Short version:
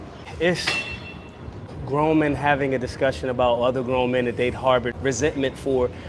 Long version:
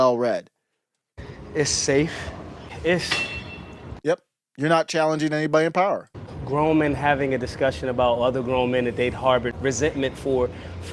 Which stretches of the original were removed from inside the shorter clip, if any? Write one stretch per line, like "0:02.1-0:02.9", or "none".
0:03.9-0:06.1

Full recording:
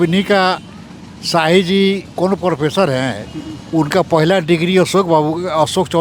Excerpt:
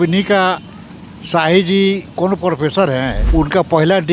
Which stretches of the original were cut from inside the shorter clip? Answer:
0:03.2-0:03.6

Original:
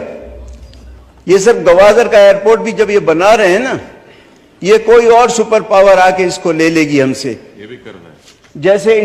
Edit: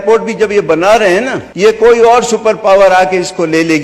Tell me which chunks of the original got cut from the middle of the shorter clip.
0:03.8-0:04.5

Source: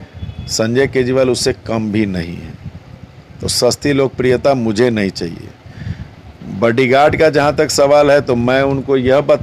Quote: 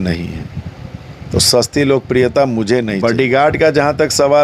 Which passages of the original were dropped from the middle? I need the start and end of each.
0:05.0-0:06.5

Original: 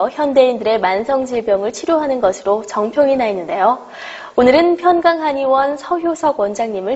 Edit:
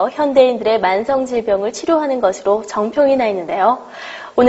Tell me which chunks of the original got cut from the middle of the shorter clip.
none

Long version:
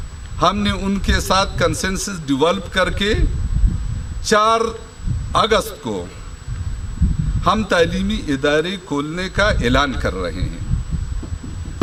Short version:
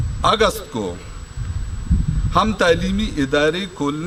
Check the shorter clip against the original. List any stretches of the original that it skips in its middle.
none

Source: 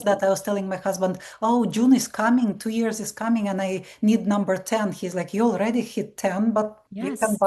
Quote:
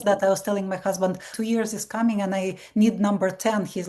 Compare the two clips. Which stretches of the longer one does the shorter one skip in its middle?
0:01.3-0:02.6

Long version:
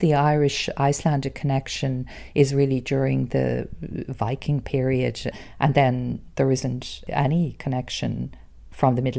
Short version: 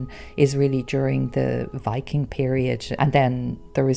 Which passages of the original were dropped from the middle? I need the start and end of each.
0:03.7-0:04.1
0:05.2-0:05.5

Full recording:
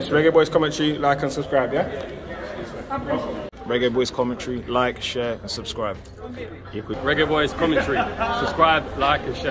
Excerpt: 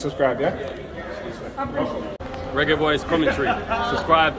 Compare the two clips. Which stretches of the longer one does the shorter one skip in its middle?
0:03.6-0:06.8

